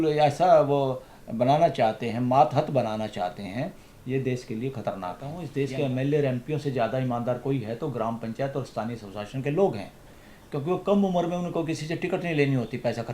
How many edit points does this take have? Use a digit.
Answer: 1